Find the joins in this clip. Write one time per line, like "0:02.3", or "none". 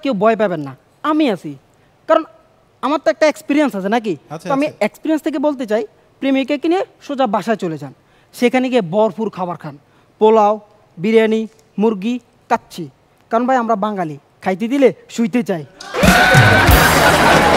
none